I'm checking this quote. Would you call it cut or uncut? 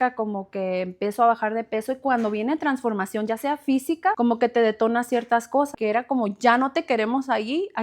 cut